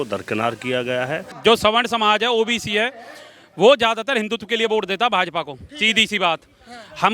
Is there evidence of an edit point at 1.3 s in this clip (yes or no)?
yes